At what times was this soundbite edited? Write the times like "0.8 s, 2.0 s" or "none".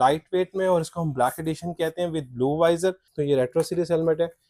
3.1 s